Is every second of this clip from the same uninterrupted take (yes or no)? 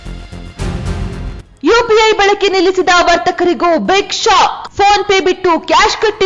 no